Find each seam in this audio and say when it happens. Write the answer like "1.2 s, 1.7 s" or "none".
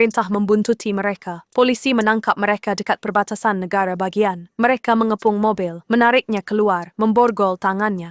none